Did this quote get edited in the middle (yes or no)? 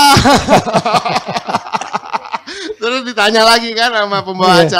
no